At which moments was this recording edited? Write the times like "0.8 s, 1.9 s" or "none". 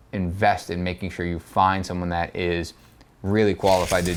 none